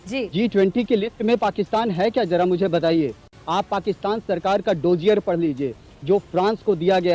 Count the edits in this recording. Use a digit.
1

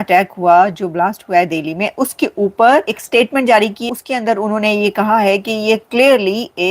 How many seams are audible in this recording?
2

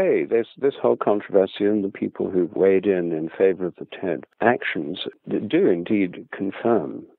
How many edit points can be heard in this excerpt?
2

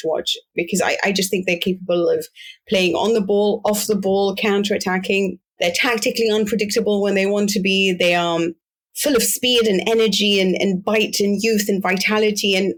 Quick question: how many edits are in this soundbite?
0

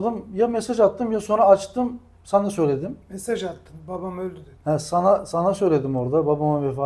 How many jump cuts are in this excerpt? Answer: 0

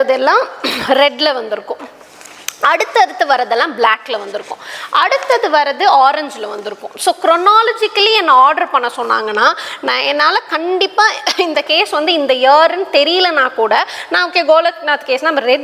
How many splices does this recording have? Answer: 0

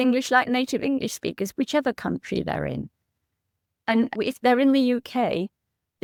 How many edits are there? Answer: 0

